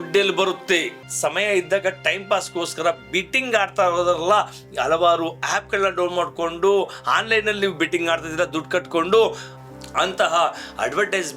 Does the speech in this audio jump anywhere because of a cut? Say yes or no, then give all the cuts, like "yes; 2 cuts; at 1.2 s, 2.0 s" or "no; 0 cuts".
yes; 1 cut; at 0.9 s